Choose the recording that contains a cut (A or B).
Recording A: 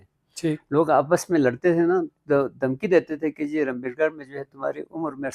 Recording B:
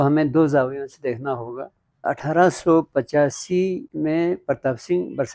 B